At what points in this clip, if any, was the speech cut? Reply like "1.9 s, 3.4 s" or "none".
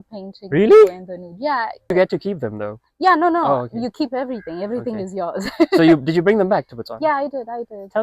1.9 s